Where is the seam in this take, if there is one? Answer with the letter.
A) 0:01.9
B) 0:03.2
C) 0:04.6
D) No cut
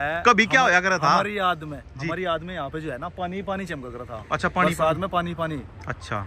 D